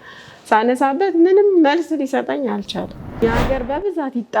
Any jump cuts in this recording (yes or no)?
yes